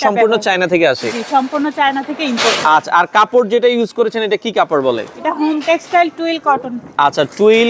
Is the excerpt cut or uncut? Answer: uncut